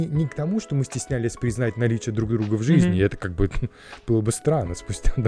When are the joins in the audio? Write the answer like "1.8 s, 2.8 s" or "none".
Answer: none